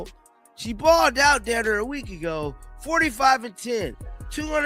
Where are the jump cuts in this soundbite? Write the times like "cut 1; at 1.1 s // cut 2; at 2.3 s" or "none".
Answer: none